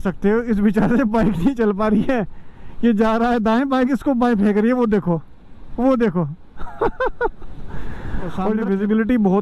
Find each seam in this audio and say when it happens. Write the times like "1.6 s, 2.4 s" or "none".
8.4 s